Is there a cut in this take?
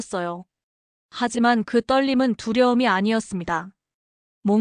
no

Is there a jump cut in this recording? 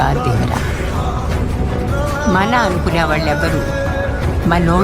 yes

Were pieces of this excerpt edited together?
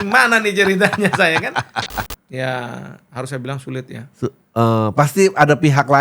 yes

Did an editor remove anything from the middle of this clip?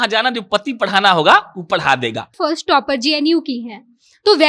yes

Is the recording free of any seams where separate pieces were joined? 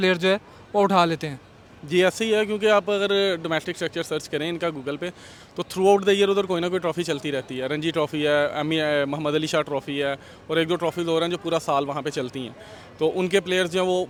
yes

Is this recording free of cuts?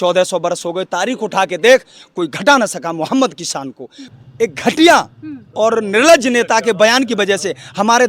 no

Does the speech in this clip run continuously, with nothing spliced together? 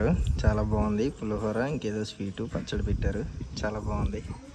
yes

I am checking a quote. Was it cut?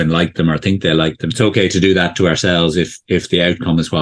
yes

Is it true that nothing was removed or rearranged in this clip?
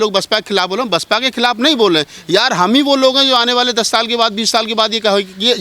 yes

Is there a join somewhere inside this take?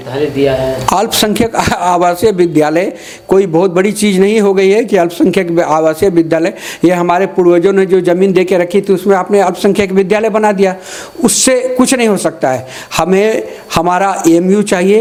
no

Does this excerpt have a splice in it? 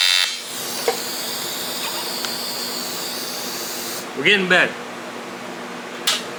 no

